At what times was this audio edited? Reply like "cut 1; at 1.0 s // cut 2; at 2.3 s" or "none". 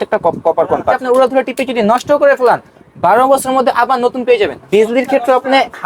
cut 1; at 1.0 s // cut 2; at 4.6 s